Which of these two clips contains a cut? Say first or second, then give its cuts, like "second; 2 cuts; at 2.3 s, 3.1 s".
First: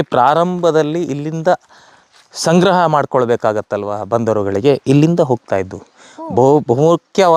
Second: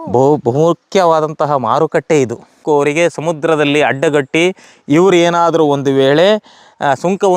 second; 1 cut; at 2.6 s